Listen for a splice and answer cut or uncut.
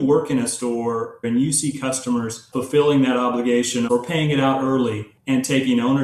cut